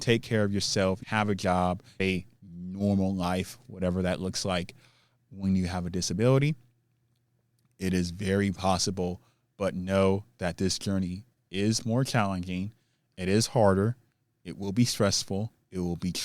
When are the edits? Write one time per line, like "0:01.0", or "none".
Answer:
0:01.0
0:02.0